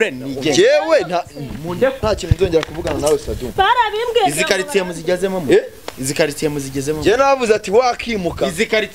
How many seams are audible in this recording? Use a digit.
1